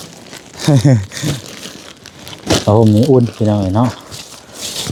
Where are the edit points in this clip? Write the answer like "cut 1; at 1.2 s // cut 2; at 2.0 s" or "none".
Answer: none